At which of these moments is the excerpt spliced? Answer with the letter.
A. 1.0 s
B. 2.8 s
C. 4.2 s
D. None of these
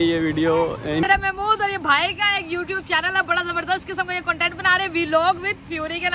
A